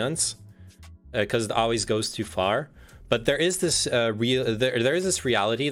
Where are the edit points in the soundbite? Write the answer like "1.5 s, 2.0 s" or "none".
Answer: none